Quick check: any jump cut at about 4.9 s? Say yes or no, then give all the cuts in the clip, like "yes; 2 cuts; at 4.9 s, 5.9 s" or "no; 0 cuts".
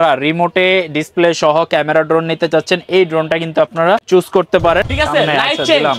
yes; 2 cuts; at 4.0 s, 4.9 s